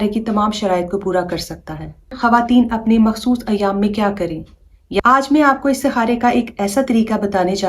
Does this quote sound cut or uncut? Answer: cut